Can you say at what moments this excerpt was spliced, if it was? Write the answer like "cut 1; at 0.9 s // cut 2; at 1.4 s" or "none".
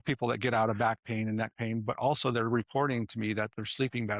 none